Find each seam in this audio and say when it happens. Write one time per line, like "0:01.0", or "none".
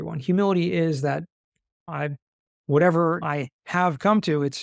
none